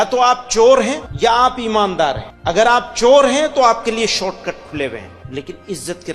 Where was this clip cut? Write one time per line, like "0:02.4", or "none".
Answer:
0:01.0
0:02.3
0:05.2